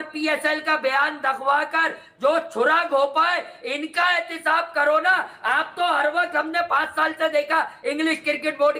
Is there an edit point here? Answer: no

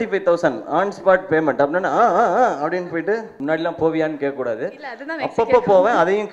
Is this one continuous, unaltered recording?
no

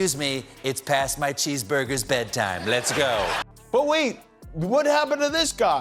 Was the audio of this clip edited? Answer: yes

